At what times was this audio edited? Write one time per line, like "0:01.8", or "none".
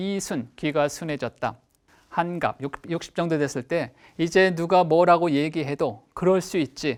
none